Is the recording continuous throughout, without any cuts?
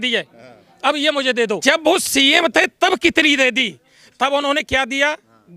no; 1 cut; at 1.6 s

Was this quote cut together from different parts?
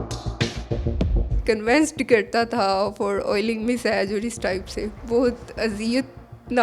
yes; 1 cut; at 1.4 s

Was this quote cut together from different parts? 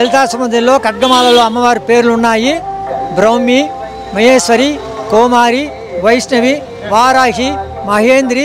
no; 0 cuts

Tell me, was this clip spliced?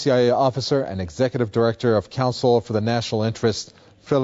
no; 0 cuts

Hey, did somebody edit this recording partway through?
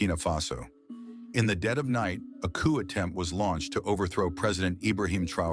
no; 0 cuts

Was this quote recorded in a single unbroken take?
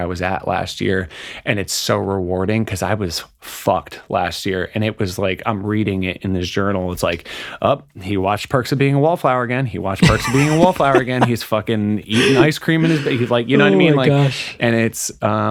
yes; 0 cuts

